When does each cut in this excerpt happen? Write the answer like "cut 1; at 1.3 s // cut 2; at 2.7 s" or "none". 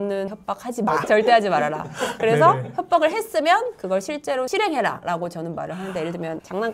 cut 1; at 1.1 s